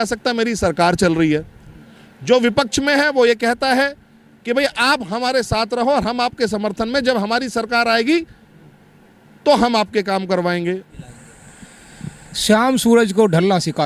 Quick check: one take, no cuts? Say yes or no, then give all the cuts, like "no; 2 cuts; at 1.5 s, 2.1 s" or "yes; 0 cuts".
no; 1 cut; at 11.0 s